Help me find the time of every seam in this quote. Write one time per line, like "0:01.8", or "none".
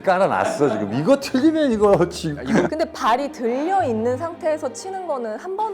0:02.7